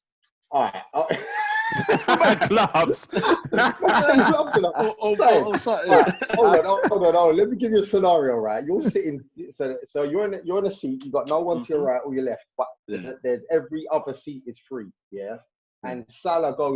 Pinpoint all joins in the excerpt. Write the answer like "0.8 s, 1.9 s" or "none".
none